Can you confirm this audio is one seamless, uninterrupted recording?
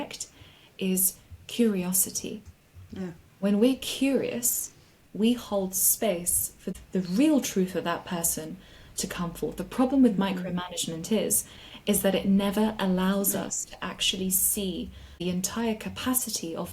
no; 2 cuts; at 6.7 s, 15.2 s

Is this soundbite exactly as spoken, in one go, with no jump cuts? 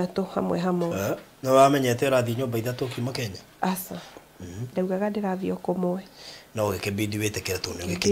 yes; 0 cuts

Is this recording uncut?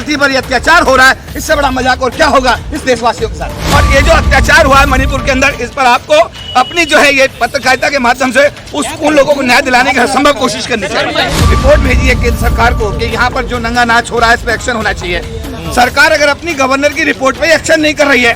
no; 2 cuts; at 3.6 s, 11.3 s

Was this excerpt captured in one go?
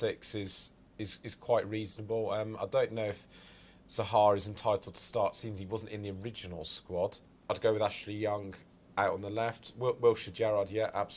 yes; 0 cuts

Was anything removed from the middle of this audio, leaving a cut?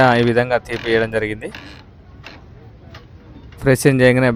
no; 0 cuts

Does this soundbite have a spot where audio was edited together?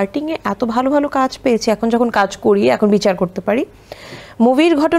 no; 0 cuts

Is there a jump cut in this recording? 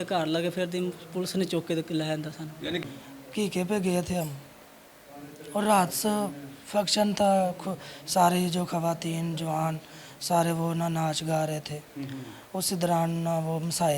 yes; 1 cut; at 2.8 s

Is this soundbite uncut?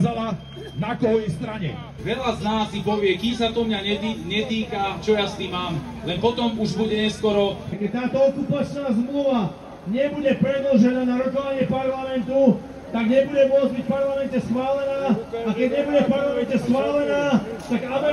no; 2 cuts; at 1.9 s, 7.8 s

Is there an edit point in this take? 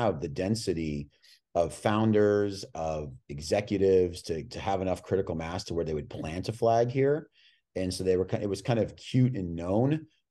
no; 0 cuts

